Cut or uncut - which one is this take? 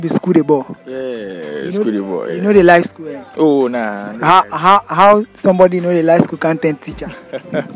uncut